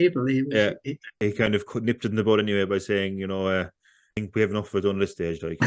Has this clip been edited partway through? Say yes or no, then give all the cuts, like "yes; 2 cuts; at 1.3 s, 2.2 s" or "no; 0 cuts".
yes; 2 cuts; at 1.2 s, 4.2 s